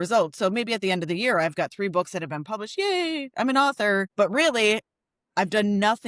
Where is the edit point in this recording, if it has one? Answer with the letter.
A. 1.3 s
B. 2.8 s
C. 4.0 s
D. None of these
D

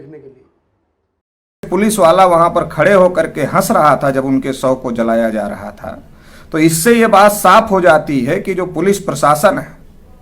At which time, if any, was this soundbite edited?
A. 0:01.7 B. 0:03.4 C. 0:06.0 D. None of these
A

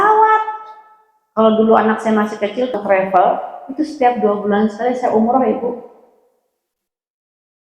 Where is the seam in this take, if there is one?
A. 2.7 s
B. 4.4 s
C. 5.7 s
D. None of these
A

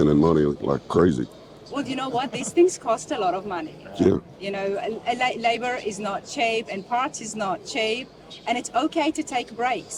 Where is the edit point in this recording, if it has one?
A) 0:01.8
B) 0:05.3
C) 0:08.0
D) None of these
D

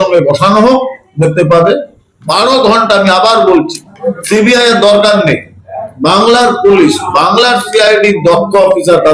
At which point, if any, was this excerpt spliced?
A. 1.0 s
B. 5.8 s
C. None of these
C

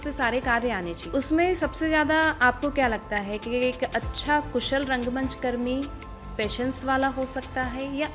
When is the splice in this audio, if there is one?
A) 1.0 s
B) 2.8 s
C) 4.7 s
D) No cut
A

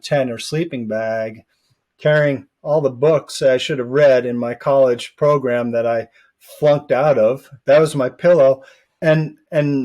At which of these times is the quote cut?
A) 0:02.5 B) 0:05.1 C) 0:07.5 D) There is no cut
C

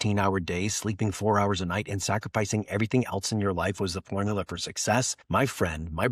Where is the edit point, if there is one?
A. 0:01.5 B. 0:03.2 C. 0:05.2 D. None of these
C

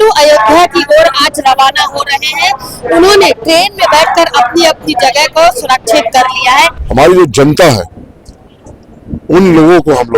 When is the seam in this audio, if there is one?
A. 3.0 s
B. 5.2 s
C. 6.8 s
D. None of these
C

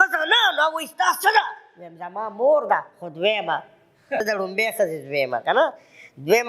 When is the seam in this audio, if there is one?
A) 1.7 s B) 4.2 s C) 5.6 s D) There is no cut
B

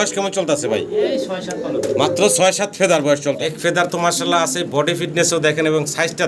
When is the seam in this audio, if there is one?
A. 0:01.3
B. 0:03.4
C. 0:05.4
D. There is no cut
B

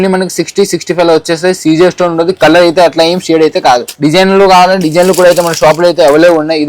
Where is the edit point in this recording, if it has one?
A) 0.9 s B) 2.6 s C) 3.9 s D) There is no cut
C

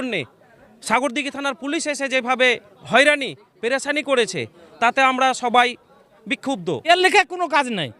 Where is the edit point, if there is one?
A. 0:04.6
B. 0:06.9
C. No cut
B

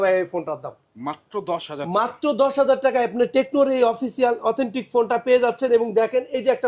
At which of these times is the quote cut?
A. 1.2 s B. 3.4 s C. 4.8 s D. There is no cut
D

